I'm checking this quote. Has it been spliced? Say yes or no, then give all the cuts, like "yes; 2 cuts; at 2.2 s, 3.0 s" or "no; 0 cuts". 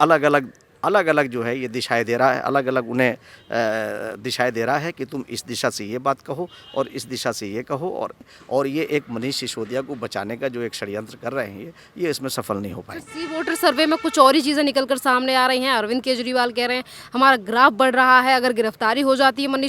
yes; 1 cut; at 8.3 s